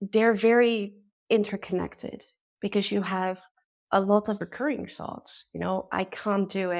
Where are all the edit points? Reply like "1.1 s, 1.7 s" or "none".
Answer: 4.4 s